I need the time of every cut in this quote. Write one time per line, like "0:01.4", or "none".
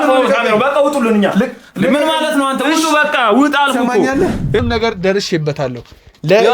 0:04.6

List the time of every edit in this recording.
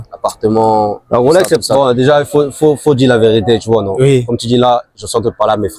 0:01.0

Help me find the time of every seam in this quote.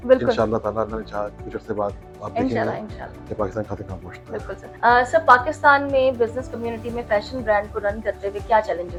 none

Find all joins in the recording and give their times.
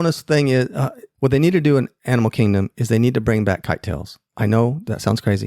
0:01.0

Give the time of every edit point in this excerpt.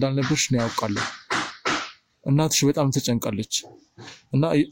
none

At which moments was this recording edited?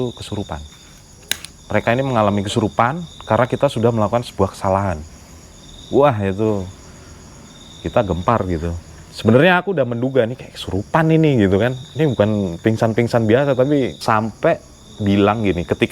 0:14.0

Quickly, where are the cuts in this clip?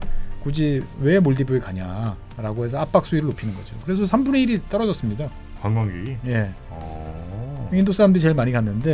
none

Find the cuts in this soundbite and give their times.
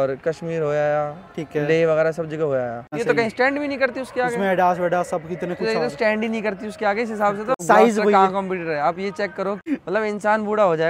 0:02.9
0:07.6
0:09.6

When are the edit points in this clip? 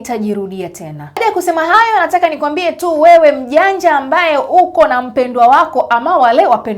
0:01.2

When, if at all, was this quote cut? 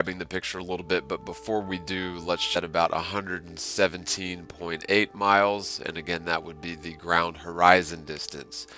none

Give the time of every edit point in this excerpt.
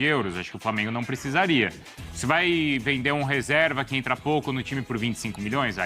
none

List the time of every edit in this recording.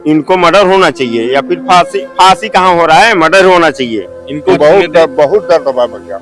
0:04.4

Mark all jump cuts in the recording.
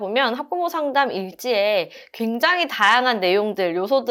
none

